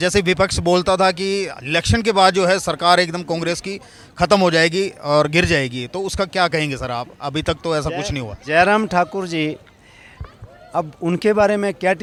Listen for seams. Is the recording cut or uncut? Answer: uncut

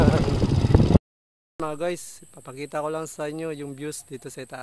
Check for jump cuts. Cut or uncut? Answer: cut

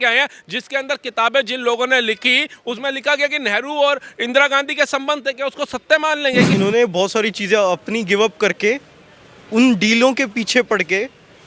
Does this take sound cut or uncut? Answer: cut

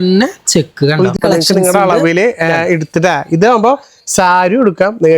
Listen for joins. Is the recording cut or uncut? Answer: cut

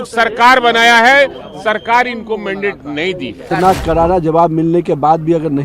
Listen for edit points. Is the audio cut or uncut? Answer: cut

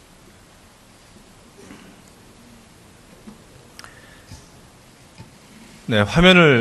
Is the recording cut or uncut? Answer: cut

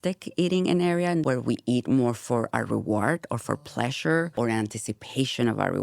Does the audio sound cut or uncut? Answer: cut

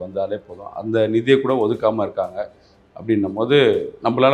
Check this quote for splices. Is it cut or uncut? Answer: uncut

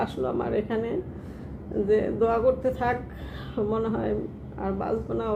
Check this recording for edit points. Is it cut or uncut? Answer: uncut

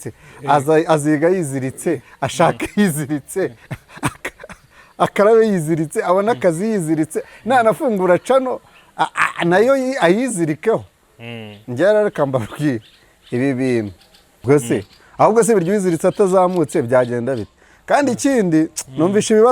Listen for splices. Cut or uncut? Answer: cut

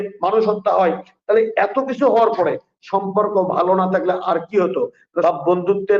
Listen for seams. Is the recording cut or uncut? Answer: cut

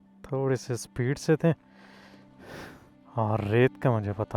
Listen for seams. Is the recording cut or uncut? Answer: cut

